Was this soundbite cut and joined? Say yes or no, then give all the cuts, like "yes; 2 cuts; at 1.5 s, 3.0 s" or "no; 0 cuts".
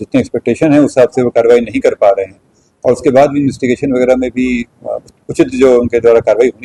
no; 0 cuts